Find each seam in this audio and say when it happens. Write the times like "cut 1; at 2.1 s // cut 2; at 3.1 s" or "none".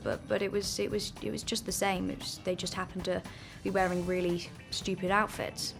none